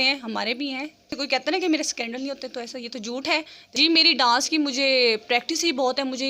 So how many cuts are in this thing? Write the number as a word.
two